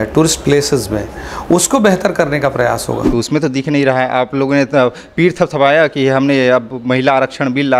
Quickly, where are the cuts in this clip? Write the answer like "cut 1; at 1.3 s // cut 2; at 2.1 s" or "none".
cut 1; at 3.1 s